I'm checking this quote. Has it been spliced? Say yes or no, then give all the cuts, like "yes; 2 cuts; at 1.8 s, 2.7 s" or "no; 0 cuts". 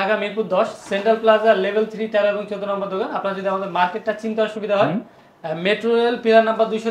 no; 0 cuts